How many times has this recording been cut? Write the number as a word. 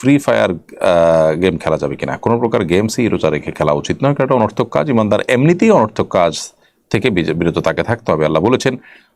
zero